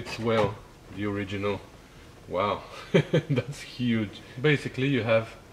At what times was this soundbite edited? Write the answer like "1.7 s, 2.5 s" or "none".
4.2 s